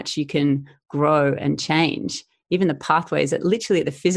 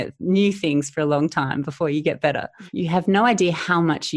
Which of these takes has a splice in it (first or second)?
second